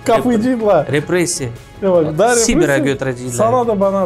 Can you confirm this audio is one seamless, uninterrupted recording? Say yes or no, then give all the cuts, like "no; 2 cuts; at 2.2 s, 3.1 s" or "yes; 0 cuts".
yes; 0 cuts